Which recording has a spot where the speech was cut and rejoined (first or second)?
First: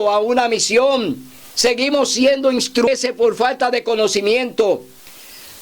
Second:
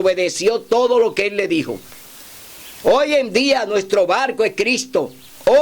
first